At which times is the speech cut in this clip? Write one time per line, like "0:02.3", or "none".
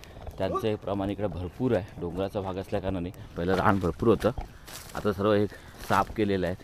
0:03.3